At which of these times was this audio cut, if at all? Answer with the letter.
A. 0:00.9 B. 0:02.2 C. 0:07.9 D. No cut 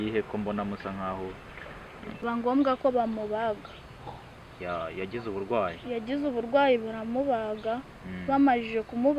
B